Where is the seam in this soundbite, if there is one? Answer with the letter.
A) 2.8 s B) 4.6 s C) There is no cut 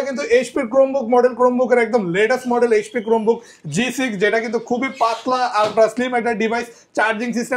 C